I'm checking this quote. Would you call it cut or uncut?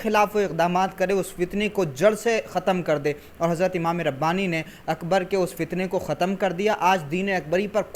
uncut